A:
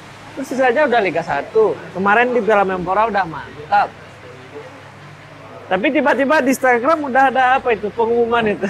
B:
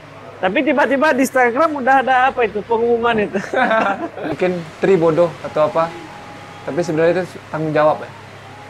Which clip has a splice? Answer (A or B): B